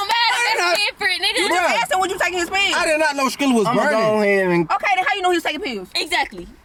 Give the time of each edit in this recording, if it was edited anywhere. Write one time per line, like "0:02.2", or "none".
none